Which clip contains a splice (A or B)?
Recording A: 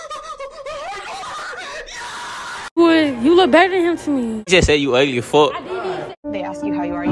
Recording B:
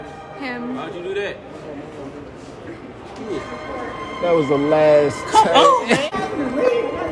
A